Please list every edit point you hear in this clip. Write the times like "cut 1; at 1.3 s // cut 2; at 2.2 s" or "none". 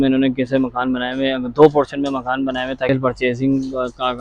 cut 1; at 2.9 s